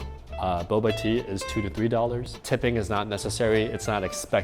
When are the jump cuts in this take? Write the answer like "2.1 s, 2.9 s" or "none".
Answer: 2.4 s